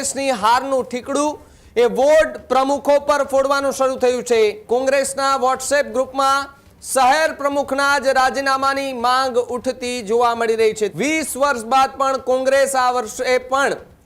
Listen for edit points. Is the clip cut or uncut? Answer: cut